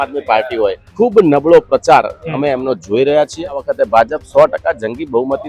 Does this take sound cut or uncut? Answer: cut